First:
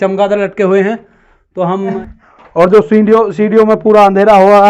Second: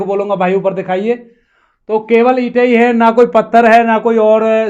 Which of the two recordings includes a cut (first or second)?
first